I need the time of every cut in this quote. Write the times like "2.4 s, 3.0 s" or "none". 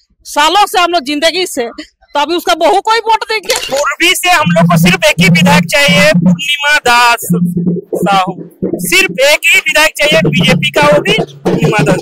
3.6 s